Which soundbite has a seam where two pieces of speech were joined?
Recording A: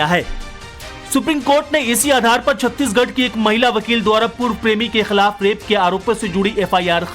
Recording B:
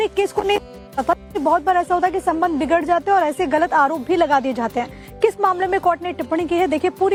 A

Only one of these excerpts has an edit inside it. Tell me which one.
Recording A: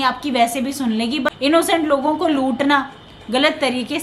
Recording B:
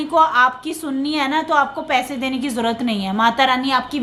A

